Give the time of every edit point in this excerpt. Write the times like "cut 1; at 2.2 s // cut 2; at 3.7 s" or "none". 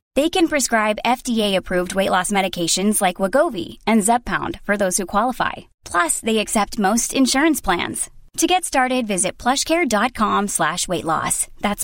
none